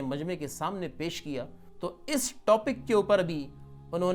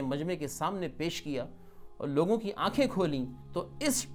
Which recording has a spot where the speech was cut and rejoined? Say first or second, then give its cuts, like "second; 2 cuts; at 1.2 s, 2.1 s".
first; 1 cut; at 1.7 s